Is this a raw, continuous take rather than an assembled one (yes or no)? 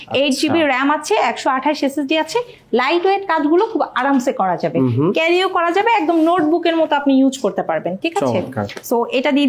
yes